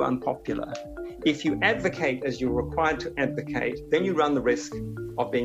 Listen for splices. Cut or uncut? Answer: cut